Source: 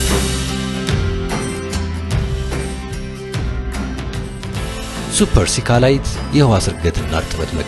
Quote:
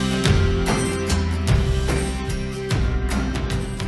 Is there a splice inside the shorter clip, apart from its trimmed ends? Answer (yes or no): no